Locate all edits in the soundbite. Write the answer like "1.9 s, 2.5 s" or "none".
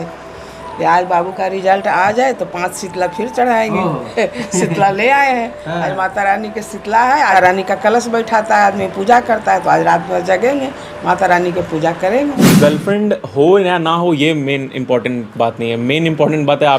7.3 s, 12.4 s